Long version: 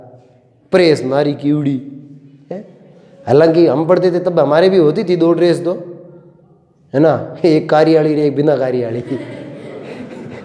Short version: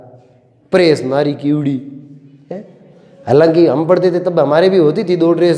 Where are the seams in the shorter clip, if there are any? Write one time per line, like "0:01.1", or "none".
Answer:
none